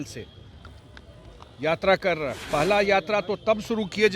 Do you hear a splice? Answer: yes; 1 cut; at 2.4 s

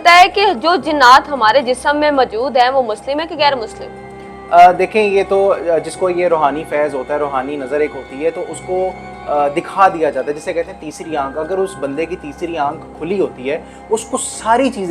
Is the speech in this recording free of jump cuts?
yes; 0 cuts

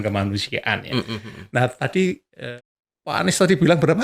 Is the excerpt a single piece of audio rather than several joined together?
no; 1 cut; at 2.4 s

